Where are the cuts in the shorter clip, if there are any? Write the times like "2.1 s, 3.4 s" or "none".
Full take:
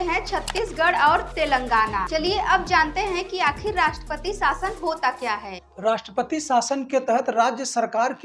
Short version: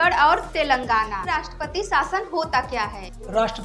1.2 s